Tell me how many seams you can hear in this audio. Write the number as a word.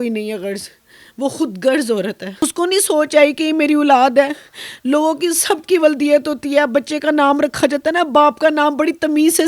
one